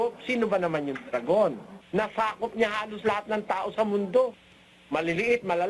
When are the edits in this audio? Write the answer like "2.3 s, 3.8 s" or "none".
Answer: 1.7 s